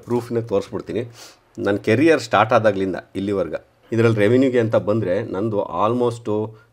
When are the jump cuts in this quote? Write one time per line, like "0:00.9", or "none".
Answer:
0:03.7